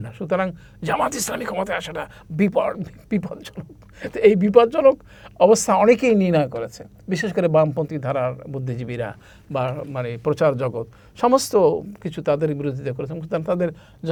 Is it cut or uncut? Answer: uncut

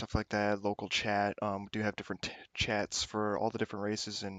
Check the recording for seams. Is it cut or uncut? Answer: uncut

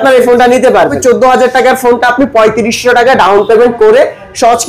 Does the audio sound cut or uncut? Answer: cut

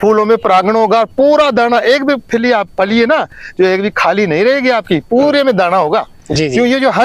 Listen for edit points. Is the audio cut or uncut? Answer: uncut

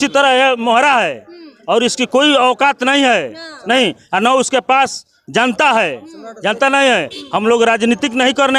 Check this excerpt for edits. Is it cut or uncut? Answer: uncut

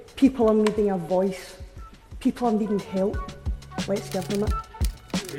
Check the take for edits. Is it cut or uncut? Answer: uncut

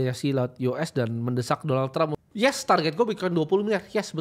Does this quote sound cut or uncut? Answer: cut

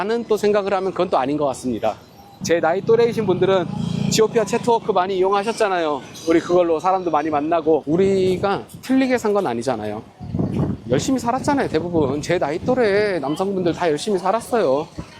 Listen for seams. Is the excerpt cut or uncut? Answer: cut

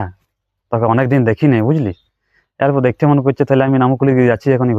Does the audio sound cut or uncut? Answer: uncut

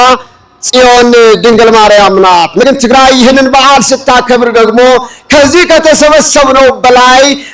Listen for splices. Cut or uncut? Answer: cut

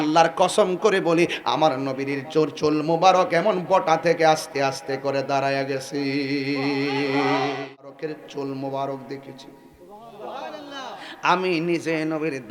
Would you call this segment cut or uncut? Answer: cut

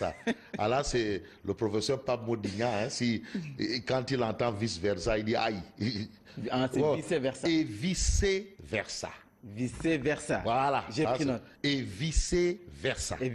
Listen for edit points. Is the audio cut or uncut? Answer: cut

